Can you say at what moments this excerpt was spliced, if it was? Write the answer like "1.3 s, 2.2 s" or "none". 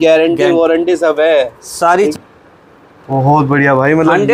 2.1 s